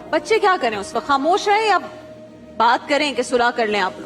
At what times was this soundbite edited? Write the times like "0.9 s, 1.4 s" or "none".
none